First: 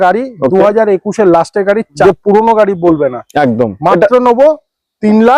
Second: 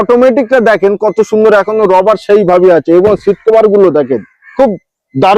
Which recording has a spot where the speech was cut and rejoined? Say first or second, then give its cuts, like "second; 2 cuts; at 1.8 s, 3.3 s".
first; 1 cut; at 2.0 s